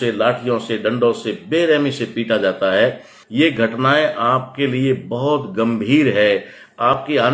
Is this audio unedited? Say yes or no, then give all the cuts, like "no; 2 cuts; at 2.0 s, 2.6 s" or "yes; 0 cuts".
no; 1 cut; at 3.1 s